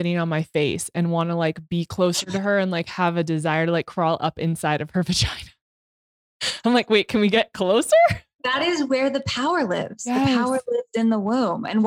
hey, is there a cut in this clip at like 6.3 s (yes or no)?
no